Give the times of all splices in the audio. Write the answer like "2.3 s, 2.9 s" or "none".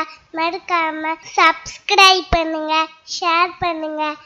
1.2 s